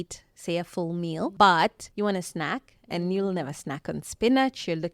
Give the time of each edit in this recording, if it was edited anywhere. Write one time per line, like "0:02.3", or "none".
0:01.3
0:01.8